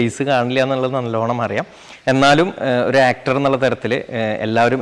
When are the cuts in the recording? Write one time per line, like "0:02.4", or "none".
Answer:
none